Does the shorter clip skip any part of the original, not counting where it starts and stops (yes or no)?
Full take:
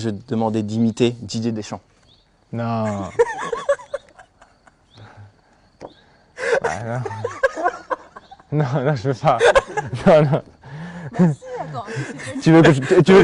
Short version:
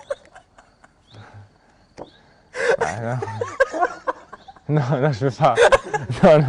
no